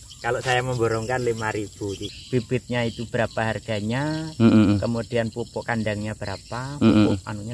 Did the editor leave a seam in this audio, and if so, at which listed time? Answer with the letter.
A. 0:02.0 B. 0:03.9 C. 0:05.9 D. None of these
A